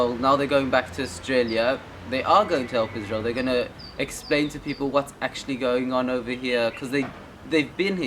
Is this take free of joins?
yes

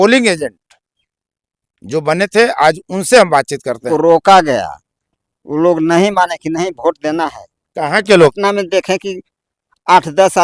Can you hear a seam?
yes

